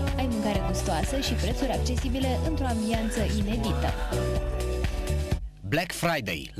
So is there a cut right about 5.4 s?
yes; 1 cut; at 5.4 s

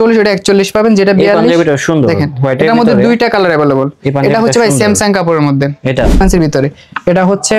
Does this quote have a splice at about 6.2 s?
yes; 1 cut; at 6.2 s

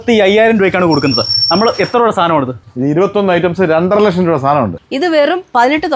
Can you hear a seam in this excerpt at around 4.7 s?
yes; 1 cut; at 4.7 s

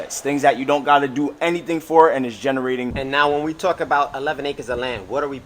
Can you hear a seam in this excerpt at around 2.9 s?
yes; 1 cut; at 2.9 s

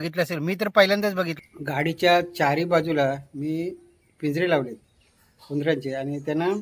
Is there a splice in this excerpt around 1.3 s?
yes; 1 cut; at 1.3 s

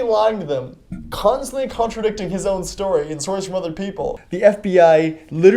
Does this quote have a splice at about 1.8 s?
no; 1 cut; at 4.2 s

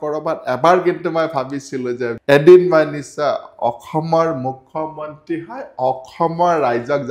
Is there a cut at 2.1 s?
yes; 1 cut; at 2.1 s

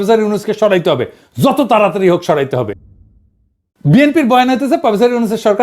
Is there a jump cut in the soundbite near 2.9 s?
yes; 1 cut; at 2.9 s

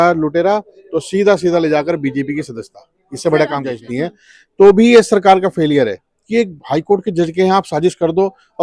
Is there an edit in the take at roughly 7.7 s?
no; 1 cut; at 3.8 s

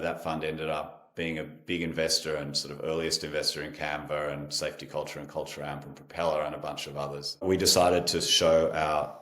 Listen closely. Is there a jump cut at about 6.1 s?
no; 1 cut; at 7.4 s

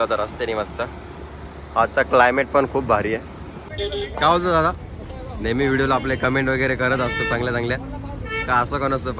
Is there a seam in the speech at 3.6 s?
yes; 1 cut; at 3.6 s

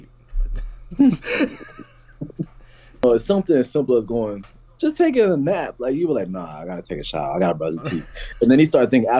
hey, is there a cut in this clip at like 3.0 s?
yes; 1 cut; at 3.0 s

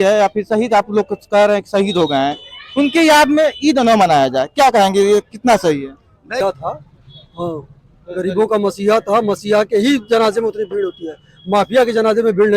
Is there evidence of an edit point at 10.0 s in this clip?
no; 1 cut; at 6.4 s

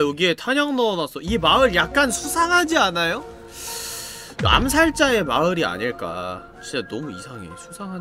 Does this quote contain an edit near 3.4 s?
yes; 1 cut; at 3.4 s

